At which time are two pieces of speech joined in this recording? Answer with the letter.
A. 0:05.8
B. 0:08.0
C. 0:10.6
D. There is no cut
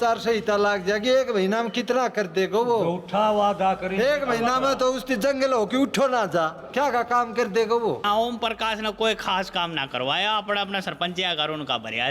B